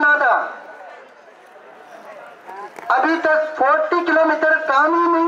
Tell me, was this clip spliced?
no; 0 cuts

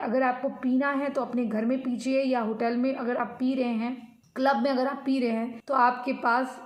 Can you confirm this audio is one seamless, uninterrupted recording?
yes; 0 cuts

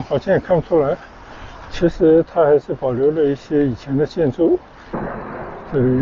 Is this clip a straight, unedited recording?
no; 1 cut; at 4.9 s

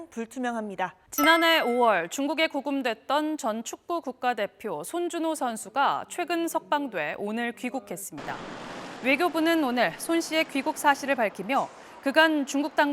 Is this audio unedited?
no; 1 cut; at 1.0 s

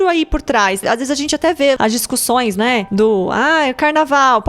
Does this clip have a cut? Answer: yes; 3 cuts; at 0.8 s, 1.8 s, 2.9 s

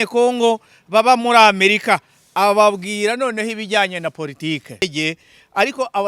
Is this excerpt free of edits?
no; 1 cut; at 4.8 s

